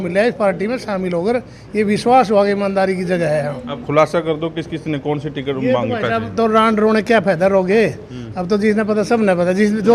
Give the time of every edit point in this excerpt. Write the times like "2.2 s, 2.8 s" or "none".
none